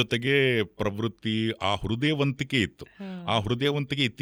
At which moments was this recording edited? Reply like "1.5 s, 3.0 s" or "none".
none